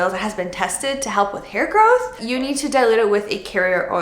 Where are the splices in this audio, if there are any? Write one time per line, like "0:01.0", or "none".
0:02.2